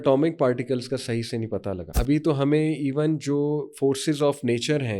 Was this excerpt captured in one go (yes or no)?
no